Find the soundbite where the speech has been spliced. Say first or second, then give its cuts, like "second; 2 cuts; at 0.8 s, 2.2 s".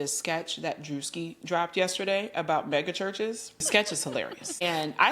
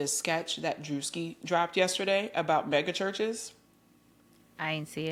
first; 1 cut; at 3.7 s